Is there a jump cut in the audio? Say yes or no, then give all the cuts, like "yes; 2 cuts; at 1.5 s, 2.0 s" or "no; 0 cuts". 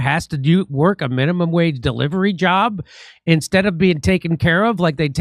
no; 0 cuts